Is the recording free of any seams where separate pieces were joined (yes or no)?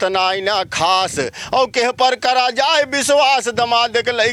yes